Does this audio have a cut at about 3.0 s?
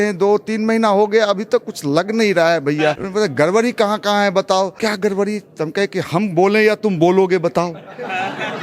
yes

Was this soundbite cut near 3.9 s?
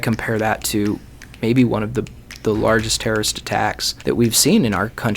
yes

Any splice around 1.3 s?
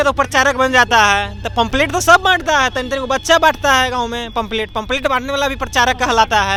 no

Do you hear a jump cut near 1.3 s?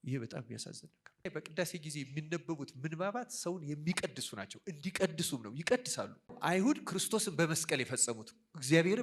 yes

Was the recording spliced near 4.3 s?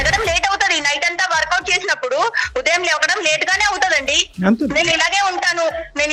no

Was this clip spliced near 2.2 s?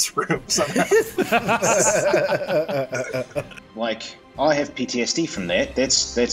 no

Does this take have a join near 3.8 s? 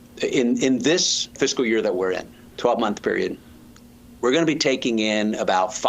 no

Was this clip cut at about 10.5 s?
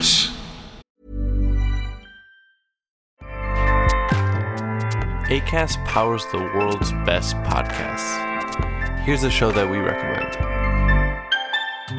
no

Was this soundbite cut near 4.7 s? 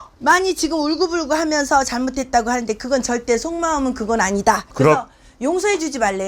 yes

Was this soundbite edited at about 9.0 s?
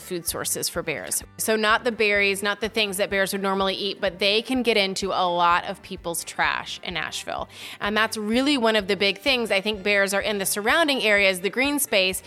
no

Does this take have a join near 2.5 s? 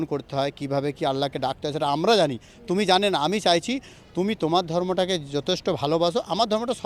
no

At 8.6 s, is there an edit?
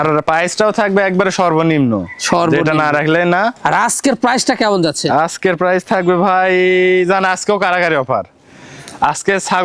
no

